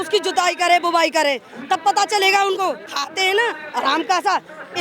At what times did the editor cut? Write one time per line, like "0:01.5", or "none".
0:02.9